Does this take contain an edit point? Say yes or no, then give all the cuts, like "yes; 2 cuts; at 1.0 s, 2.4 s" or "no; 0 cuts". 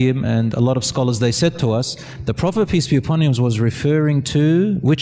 no; 0 cuts